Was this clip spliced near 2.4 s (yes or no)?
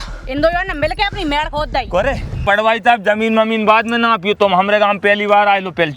yes